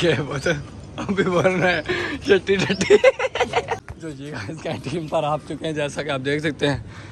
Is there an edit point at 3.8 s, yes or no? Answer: yes